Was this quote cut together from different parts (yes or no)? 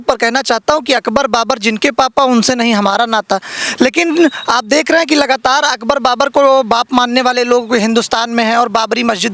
no